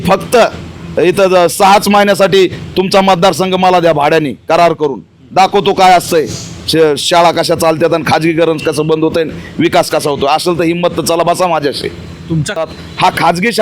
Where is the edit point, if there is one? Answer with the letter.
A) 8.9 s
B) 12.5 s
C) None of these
B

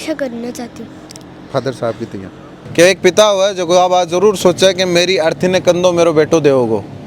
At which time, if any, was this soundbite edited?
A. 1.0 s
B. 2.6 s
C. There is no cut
B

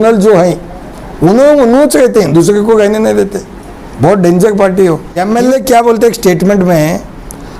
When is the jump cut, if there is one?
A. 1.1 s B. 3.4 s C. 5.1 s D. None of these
C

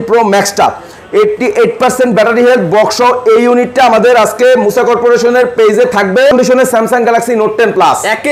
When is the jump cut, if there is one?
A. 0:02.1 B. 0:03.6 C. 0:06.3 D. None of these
C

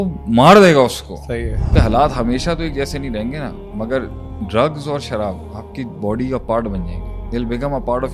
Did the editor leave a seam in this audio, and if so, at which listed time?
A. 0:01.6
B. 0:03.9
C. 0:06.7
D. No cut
A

